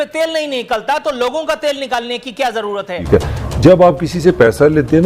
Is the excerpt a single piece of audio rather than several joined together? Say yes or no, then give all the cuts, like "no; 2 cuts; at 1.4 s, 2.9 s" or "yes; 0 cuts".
no; 1 cut; at 3.0 s